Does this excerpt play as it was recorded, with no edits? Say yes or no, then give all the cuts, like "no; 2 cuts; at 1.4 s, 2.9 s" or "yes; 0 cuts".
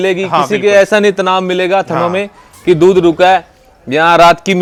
yes; 0 cuts